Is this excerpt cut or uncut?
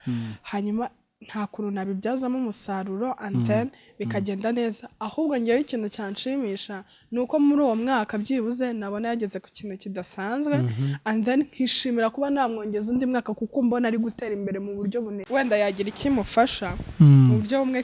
cut